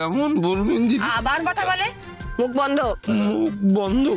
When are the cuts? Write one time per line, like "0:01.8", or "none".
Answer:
none